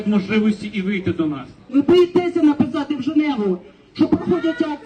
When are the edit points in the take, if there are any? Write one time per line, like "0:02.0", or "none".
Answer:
0:01.7